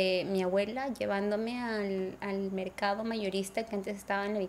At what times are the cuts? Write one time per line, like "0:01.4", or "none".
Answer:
none